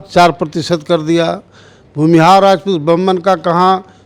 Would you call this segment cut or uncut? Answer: uncut